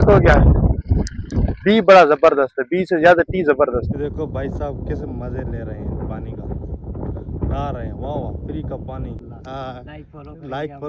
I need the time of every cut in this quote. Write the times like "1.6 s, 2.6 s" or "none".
3.9 s, 9.2 s